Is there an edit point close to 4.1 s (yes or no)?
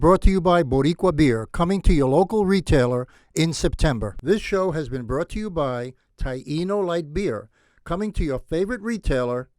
yes